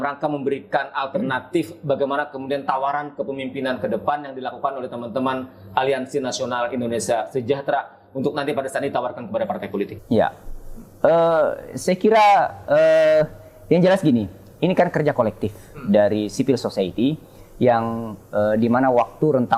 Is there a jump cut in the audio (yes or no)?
no